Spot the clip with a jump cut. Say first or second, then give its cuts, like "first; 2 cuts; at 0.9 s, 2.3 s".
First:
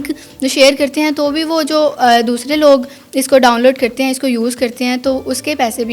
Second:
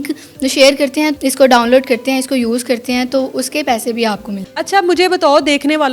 second; 2 cuts; at 1.1 s, 4.5 s